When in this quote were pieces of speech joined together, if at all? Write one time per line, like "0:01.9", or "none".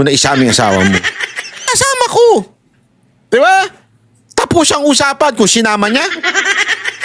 0:01.7